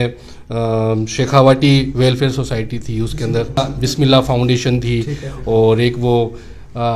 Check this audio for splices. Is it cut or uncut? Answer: uncut